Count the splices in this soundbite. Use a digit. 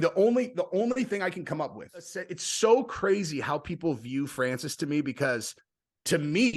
1